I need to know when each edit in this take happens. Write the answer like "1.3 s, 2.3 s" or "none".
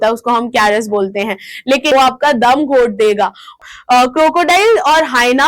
1.9 s, 3.6 s